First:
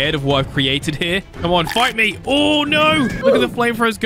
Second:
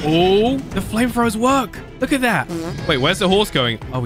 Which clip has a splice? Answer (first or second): first